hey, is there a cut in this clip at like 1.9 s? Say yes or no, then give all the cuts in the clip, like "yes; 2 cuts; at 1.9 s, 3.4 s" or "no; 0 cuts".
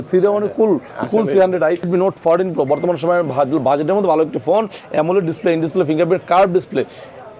yes; 1 cut; at 1.9 s